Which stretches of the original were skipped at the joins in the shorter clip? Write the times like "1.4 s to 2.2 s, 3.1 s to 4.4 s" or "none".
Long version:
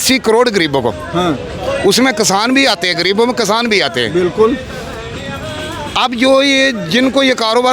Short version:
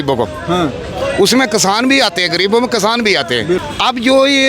4.2 s to 5.7 s